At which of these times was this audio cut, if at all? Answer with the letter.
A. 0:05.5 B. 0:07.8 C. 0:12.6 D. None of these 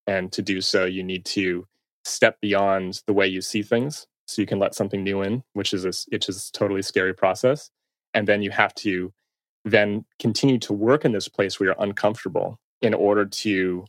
C